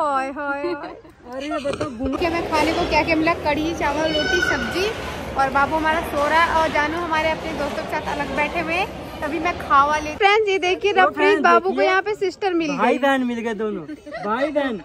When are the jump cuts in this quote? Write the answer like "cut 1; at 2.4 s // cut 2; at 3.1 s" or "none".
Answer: cut 1; at 2.2 s // cut 2; at 10.1 s